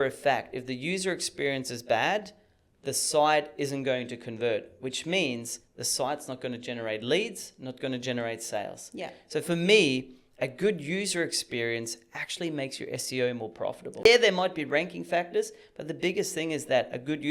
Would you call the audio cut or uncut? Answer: cut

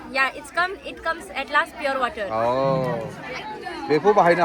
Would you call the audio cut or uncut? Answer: uncut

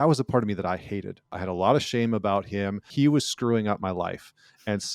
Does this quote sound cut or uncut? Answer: cut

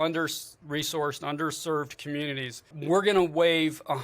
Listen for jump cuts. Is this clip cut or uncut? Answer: cut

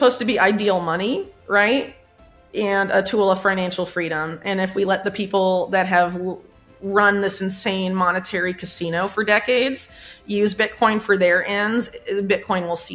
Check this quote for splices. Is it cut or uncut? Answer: uncut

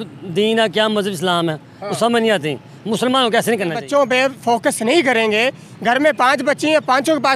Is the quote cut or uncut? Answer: cut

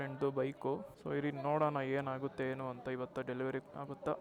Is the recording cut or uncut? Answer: cut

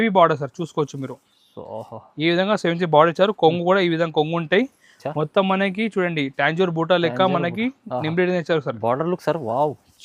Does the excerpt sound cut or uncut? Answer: uncut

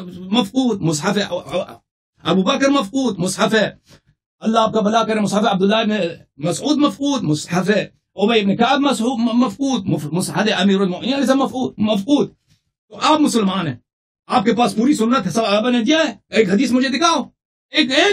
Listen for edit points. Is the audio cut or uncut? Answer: uncut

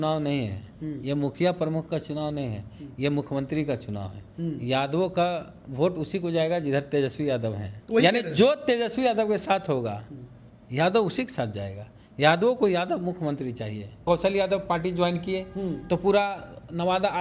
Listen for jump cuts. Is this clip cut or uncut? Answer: cut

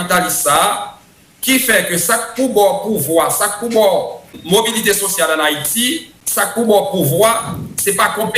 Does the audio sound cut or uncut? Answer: cut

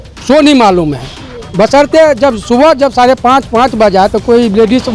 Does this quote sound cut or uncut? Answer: uncut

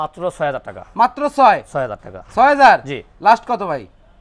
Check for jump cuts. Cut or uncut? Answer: uncut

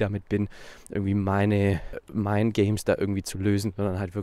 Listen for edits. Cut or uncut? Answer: cut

